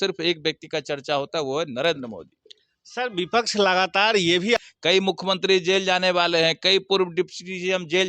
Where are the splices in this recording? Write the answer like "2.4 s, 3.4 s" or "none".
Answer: 4.6 s